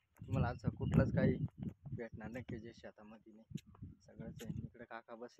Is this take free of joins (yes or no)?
yes